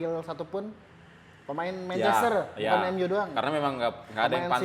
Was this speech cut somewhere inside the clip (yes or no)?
no